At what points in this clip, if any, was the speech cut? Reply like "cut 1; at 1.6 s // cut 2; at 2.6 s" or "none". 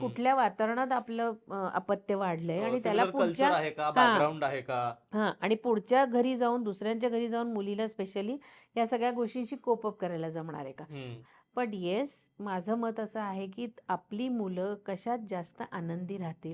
cut 1; at 11.2 s